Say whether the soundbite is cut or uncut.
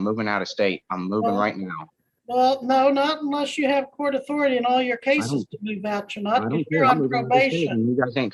uncut